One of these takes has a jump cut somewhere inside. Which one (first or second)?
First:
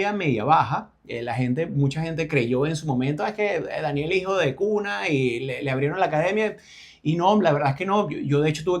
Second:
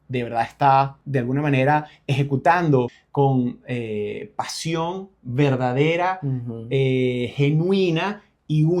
second